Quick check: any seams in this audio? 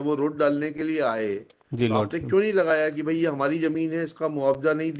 no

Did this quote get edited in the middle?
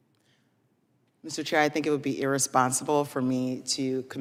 no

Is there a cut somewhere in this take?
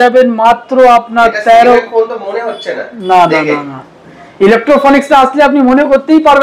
no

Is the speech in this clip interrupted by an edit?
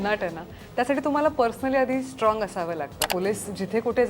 yes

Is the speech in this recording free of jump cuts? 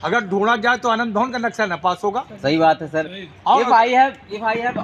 yes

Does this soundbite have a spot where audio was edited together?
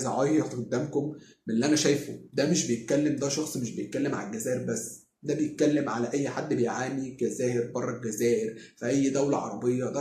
no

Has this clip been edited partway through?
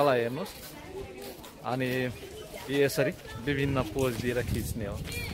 no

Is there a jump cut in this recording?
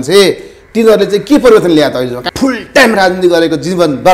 yes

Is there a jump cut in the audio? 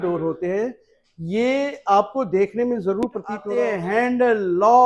yes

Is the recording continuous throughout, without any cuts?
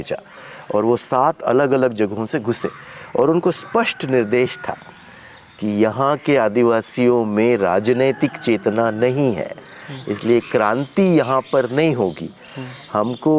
yes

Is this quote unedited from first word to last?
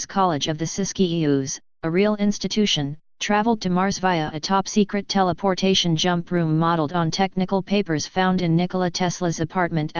yes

